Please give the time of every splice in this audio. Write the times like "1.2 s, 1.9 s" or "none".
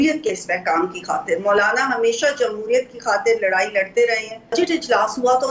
4.5 s

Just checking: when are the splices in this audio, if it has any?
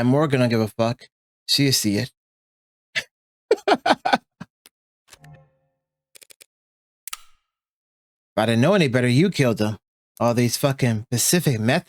none

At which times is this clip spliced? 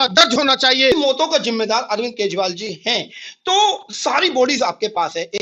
0.9 s

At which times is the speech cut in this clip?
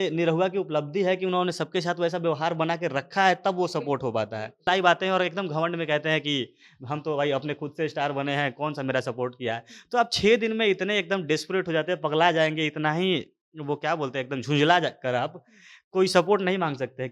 4.7 s

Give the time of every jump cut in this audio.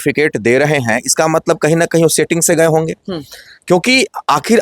none

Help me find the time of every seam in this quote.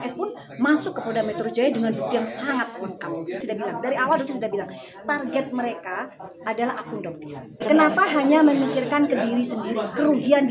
3.4 s, 7.6 s

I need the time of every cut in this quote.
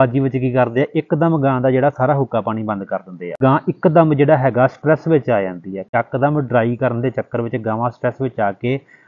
3.4 s, 5.9 s

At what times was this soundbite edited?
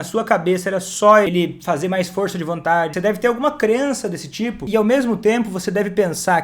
1.3 s, 2.9 s, 4.7 s

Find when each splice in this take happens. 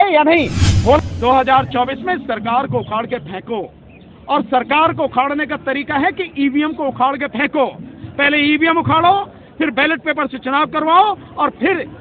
1.0 s

